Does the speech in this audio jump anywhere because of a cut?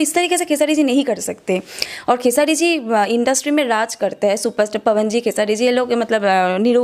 yes; 1 cut; at 1.8 s

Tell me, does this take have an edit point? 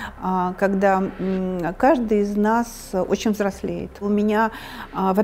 yes; 1 cut; at 4.0 s

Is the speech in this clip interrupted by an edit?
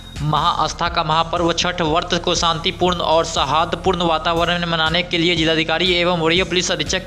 no; 0 cuts

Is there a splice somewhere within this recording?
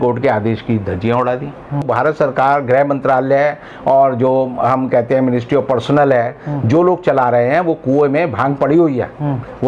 yes; 1 cut; at 1.9 s

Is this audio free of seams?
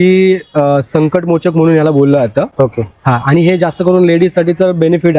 yes; 0 cuts

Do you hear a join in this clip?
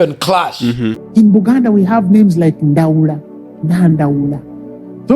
yes; 1 cut; at 1.0 s

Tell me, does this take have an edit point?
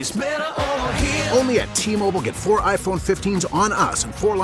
no; 0 cuts

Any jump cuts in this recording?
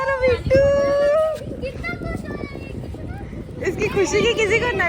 no; 0 cuts

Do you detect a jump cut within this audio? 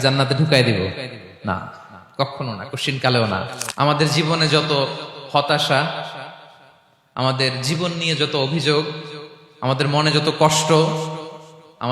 yes; 1 cut; at 3.6 s

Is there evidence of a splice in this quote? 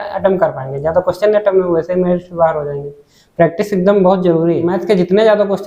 yes; 1 cut; at 4.8 s

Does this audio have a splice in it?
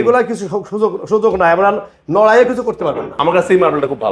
yes; 1 cut; at 3.1 s

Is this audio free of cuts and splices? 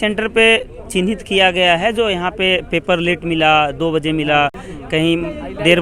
yes; 0 cuts

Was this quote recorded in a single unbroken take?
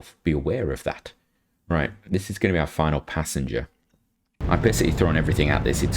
no; 1 cut; at 4.3 s

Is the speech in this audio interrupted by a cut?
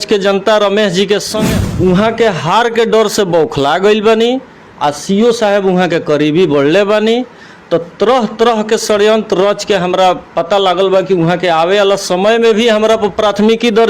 yes; 1 cut; at 1.4 s

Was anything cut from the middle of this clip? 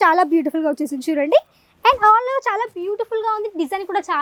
no; 0 cuts

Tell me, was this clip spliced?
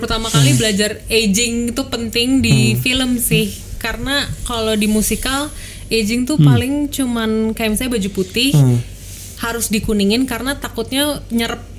no; 0 cuts

